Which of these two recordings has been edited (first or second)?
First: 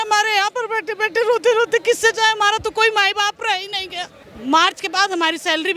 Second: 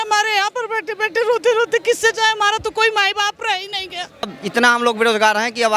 second